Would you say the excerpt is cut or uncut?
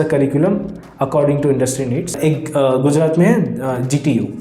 cut